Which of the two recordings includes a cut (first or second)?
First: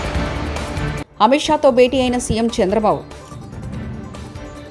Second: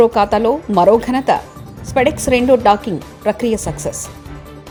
first